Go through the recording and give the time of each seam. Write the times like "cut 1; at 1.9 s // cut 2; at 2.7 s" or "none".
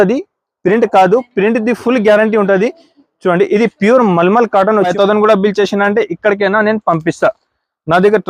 cut 1; at 4.9 s

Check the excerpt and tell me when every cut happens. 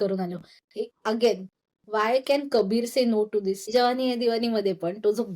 cut 1; at 3.7 s

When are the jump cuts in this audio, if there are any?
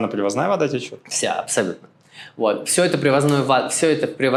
none

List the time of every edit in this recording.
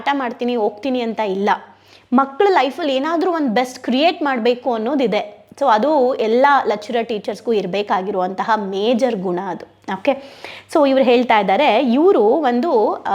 none

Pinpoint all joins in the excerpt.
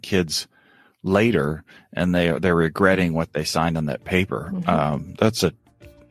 none

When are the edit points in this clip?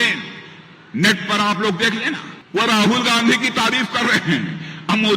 cut 1; at 2.3 s

